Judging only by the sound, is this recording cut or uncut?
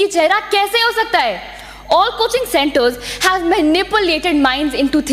uncut